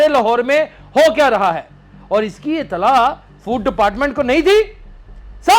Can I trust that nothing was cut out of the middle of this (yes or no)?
yes